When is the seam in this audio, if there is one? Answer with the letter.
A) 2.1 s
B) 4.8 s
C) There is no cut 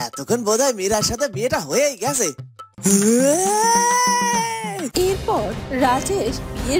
B